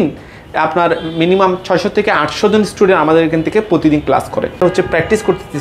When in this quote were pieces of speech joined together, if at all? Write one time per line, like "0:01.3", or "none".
0:04.6